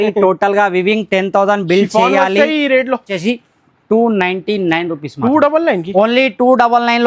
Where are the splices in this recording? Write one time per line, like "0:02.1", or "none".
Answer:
0:03.1